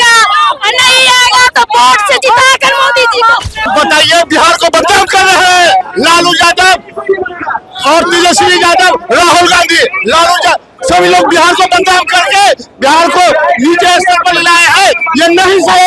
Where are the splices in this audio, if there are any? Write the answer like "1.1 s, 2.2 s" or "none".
3.7 s